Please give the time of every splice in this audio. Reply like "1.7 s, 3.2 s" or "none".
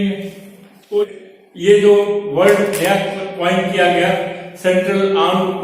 1.1 s